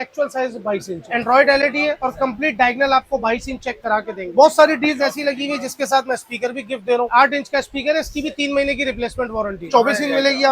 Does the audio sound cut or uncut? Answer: cut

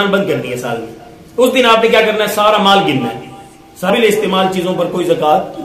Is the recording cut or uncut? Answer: cut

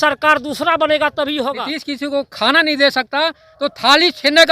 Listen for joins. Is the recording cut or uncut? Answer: cut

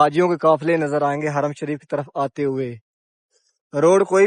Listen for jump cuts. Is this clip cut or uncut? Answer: uncut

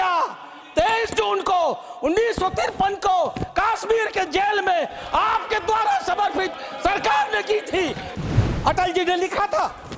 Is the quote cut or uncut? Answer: cut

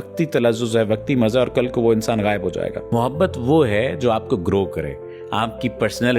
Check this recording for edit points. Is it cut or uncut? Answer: cut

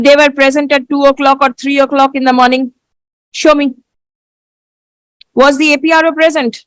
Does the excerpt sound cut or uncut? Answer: uncut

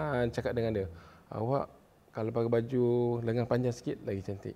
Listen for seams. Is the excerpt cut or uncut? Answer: uncut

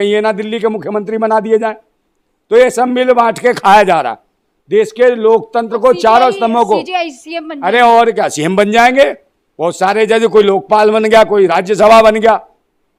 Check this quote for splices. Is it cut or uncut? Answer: uncut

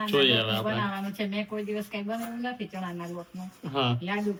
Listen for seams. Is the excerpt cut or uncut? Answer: uncut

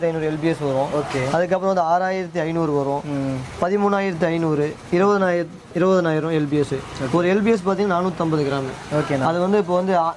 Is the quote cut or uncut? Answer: uncut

